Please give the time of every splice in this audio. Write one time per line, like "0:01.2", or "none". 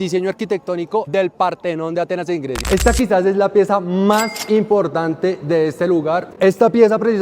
0:02.6
0:06.3